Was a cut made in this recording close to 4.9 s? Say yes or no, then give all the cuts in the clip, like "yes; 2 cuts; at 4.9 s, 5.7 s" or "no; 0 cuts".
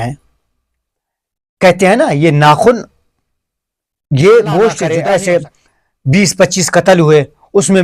yes; 1 cut; at 4.9 s